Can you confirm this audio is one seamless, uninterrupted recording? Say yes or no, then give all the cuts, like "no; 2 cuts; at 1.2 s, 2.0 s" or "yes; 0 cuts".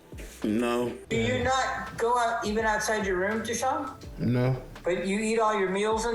no; 2 cuts; at 1.0 s, 4.7 s